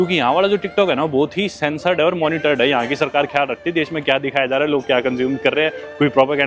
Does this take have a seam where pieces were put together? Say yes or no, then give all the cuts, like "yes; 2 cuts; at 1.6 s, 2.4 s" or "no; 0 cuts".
no; 0 cuts